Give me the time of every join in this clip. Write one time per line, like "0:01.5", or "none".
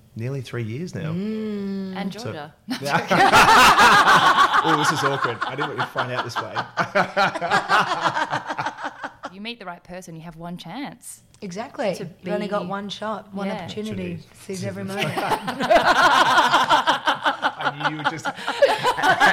0:09.3